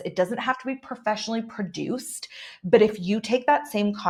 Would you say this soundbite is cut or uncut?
uncut